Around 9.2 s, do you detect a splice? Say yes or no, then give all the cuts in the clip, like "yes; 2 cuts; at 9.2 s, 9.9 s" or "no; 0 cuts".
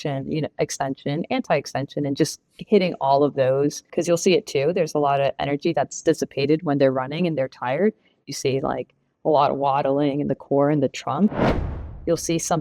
no; 2 cuts; at 3.9 s, 11.5 s